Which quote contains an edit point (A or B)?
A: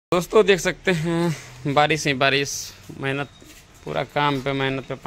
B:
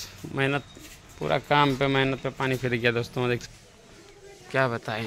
B